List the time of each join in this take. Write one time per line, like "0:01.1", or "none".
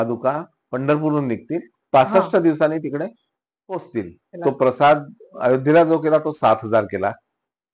0:01.9
0:04.3